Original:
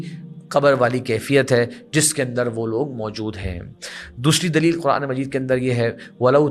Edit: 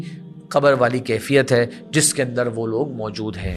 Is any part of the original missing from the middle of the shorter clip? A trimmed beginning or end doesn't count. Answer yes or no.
no